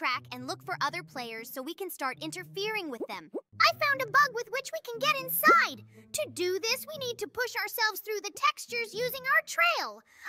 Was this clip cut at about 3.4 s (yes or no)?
no